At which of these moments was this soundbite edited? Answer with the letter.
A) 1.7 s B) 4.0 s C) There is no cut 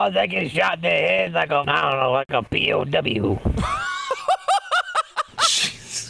A